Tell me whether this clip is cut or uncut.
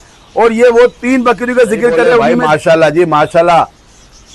cut